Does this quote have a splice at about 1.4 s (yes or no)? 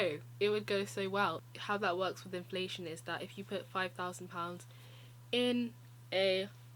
yes